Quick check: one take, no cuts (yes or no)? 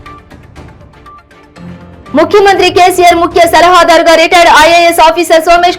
no